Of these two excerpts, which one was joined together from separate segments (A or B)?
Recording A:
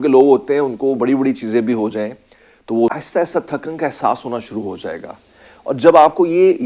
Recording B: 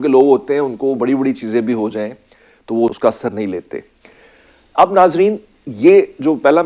A